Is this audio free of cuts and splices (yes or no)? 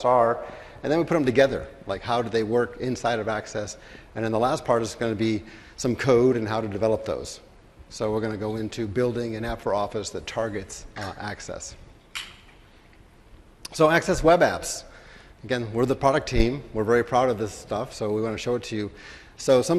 no